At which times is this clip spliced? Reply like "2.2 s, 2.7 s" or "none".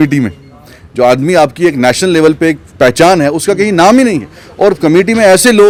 none